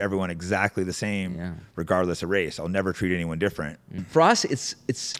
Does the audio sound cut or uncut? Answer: cut